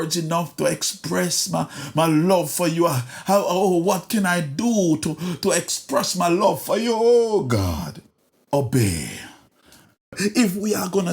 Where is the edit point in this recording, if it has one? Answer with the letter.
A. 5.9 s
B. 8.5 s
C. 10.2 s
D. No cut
C